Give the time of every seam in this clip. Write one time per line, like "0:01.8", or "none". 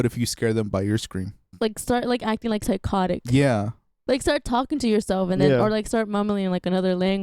0:01.4
0:03.9